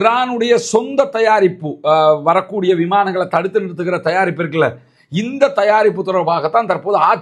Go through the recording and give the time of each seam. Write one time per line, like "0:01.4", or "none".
none